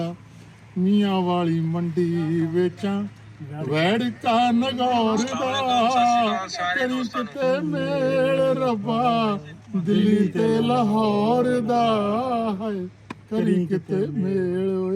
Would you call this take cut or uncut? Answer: uncut